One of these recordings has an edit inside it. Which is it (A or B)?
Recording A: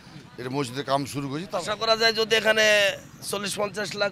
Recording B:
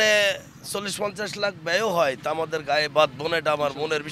A